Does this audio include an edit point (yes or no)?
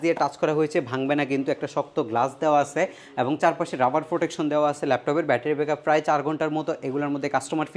no